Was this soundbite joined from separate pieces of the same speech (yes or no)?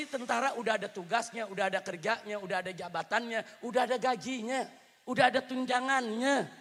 no